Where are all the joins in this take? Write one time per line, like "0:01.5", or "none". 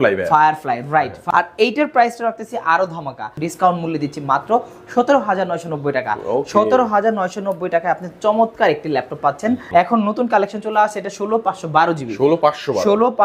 0:01.2
0:03.4
0:09.6